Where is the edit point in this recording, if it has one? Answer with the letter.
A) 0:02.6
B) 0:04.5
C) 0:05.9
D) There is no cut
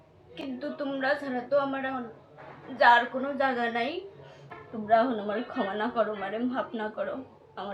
B